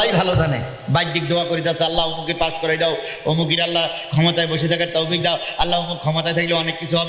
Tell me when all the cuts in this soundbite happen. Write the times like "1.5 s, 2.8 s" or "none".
none